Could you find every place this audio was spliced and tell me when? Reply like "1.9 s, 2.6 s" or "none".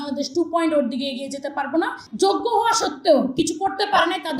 2.0 s

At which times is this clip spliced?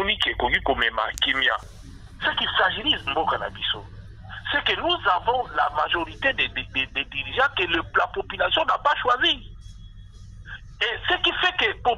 1.8 s

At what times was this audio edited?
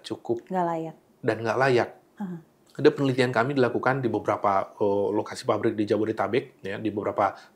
none

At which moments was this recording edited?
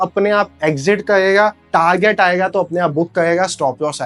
none

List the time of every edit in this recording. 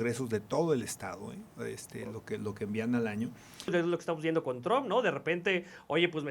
3.7 s

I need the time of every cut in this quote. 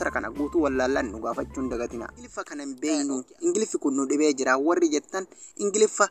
2.5 s

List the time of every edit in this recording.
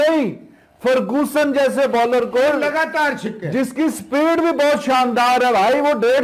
none

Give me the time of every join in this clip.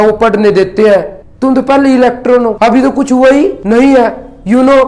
1.2 s, 2.5 s, 3.6 s

